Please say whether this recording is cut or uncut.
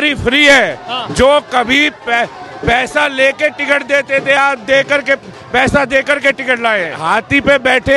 cut